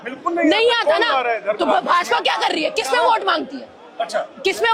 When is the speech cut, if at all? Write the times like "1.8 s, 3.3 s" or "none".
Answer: none